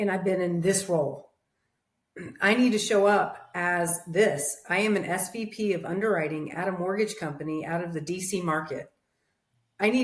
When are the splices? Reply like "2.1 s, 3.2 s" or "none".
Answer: none